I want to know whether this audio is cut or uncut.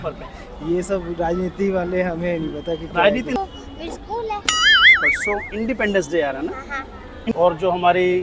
cut